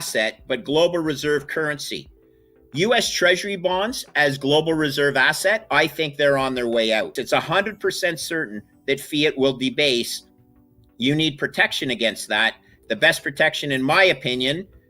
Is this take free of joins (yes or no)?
no